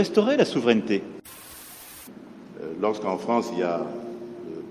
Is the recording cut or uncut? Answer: cut